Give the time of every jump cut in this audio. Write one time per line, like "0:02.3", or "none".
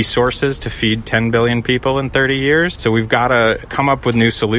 0:02.7
0:03.7